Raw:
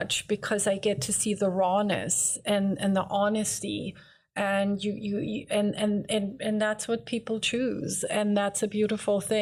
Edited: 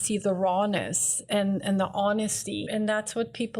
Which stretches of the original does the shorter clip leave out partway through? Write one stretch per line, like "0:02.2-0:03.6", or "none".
0:03.8-0:06.4